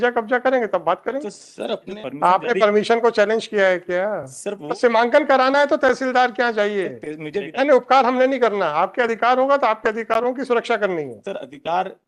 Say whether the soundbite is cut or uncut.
cut